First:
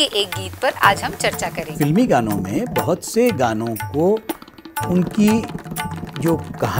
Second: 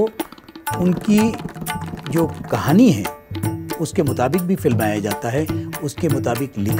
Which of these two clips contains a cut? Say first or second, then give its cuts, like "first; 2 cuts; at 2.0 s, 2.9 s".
first; 1 cut; at 1.7 s